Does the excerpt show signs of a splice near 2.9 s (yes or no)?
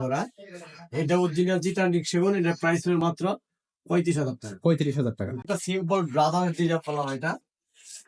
no